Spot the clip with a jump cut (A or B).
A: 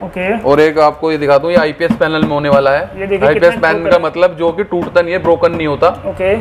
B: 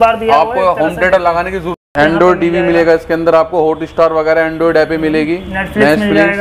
B